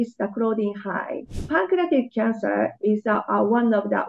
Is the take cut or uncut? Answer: cut